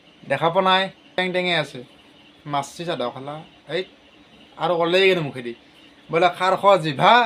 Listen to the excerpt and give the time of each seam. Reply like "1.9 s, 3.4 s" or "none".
1.2 s